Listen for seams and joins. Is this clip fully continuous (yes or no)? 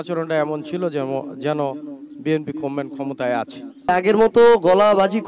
no